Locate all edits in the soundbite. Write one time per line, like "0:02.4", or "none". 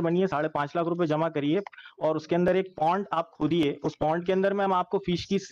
none

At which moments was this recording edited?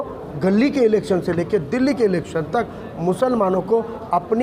none

